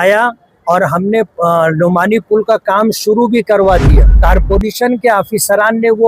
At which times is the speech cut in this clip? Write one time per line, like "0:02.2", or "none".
0:04.1